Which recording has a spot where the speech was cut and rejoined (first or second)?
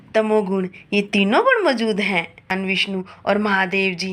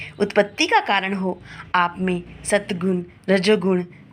first